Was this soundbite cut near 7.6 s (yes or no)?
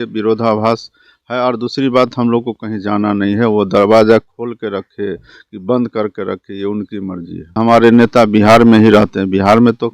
yes